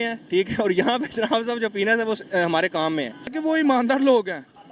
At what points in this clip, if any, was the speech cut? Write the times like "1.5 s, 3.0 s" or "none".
3.3 s